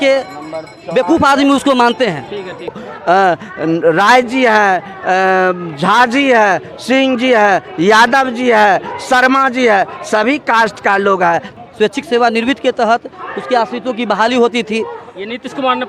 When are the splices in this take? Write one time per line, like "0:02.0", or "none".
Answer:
0:02.8
0:11.5